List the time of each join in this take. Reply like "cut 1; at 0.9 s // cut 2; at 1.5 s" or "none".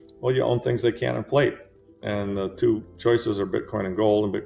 none